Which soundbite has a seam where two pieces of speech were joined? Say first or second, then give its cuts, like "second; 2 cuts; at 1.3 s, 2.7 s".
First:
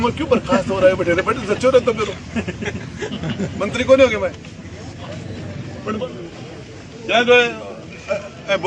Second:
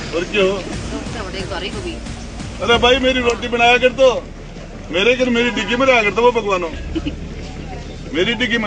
first; 1 cut; at 6.0 s